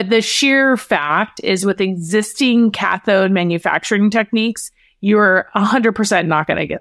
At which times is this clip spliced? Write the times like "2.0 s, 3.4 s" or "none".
none